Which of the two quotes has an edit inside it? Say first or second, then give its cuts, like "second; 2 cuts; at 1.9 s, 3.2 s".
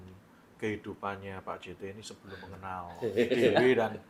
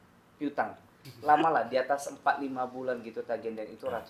second; 1 cut; at 1.1 s